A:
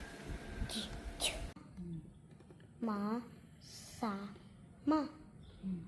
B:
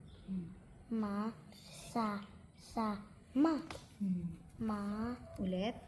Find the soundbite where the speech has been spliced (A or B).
A